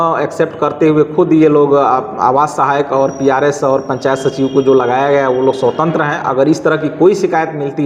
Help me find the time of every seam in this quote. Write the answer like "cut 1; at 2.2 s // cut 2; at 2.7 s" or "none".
none